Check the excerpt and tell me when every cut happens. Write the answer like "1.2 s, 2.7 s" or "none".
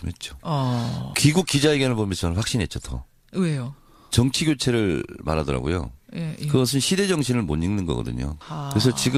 none